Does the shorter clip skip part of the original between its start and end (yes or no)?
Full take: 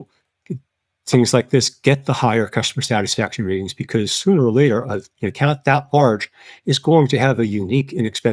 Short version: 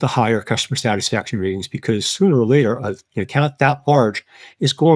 no